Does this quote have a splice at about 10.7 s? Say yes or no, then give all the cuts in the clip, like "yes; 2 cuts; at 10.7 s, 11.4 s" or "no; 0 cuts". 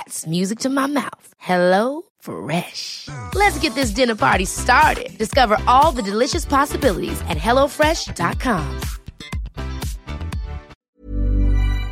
yes; 1 cut; at 10.7 s